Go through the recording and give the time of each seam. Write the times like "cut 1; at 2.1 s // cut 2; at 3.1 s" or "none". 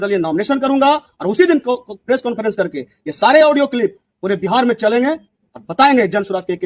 none